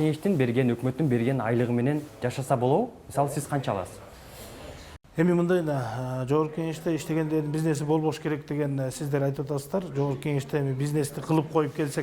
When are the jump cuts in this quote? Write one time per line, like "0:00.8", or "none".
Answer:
none